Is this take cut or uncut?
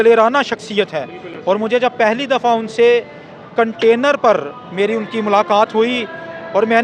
uncut